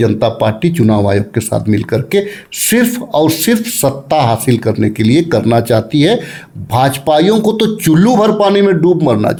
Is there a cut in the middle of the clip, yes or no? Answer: no